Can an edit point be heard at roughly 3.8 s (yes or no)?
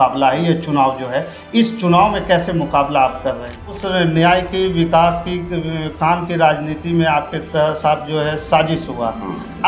yes